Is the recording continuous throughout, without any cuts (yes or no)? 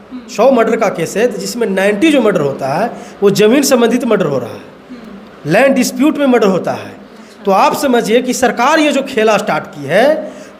yes